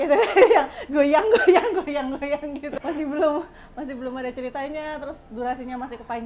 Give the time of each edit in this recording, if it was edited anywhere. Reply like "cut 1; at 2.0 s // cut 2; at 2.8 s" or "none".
cut 1; at 2.7 s